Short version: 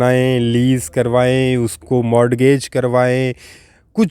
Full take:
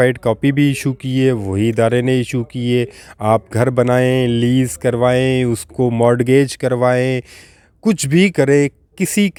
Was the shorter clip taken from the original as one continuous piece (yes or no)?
yes